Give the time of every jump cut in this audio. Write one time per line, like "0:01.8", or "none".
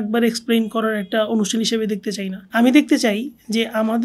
0:02.4